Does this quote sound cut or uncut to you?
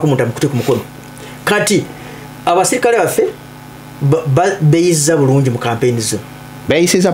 uncut